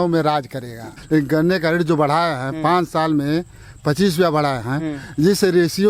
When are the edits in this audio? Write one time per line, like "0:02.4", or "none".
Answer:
0:00.9